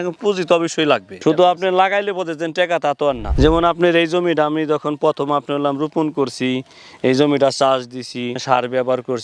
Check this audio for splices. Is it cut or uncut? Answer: cut